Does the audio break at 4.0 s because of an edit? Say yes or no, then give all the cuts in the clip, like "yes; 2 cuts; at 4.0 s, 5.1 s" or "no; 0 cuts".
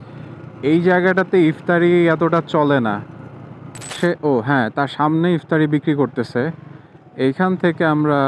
yes; 1 cut; at 4.0 s